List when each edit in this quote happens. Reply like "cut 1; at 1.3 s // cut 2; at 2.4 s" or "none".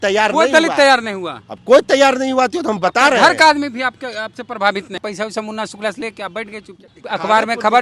cut 1; at 5.0 s // cut 2; at 6.7 s